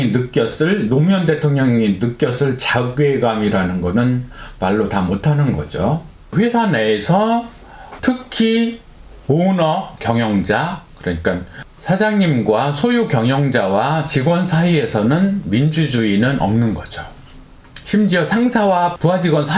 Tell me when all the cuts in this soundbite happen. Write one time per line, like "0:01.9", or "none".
0:06.1